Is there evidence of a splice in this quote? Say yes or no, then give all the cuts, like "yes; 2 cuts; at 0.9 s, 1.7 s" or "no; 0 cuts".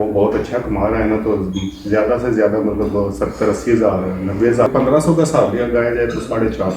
yes; 1 cut; at 4.7 s